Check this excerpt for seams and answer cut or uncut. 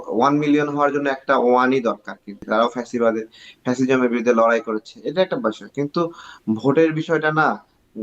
cut